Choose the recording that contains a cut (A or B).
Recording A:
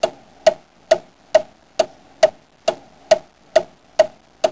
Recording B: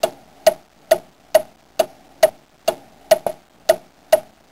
A